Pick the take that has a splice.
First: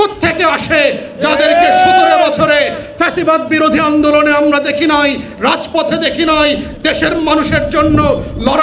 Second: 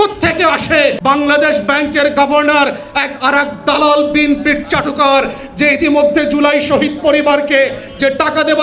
second; 1 cut; at 1.0 s

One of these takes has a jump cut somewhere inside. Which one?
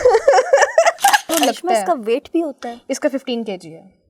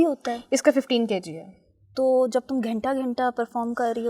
first; 1 cut; at 1.3 s

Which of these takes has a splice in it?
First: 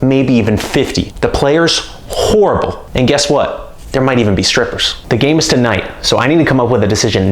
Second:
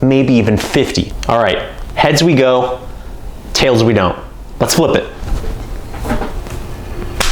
second; 1 cut; at 1.2 s

